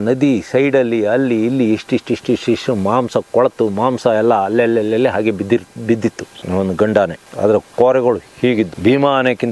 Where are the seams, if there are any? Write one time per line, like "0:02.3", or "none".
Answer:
0:06.4